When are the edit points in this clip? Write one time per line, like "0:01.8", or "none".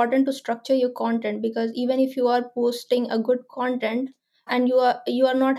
none